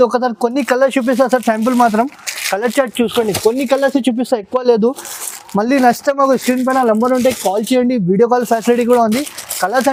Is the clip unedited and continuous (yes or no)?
yes